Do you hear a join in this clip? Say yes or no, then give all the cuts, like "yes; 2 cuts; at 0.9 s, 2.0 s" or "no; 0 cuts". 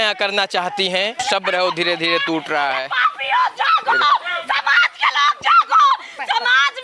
yes; 1 cut; at 1.2 s